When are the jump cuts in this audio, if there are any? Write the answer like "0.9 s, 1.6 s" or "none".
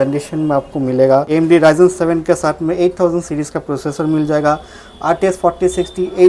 1.3 s

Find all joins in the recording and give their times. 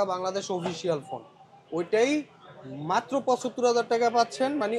none

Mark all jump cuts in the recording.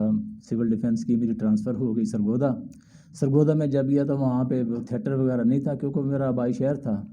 none

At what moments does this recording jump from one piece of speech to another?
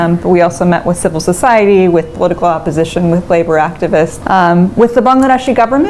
4.2 s

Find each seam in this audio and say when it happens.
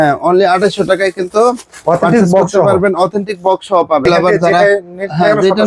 4.0 s

